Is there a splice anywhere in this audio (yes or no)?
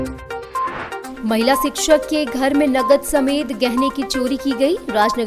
yes